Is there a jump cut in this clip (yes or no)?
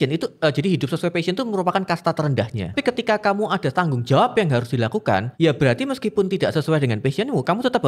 yes